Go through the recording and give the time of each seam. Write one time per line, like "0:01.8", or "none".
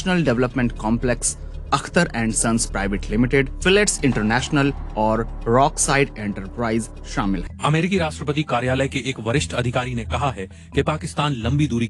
0:07.5